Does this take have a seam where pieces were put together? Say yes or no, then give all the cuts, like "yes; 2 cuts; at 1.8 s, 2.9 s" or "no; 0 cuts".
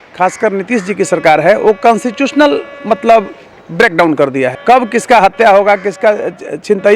yes; 1 cut; at 4.6 s